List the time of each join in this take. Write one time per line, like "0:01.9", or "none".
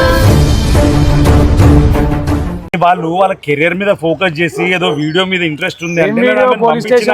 0:02.5